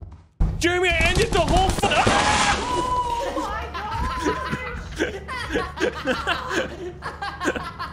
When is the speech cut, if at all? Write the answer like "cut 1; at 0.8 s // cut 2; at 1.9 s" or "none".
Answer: cut 1; at 1.9 s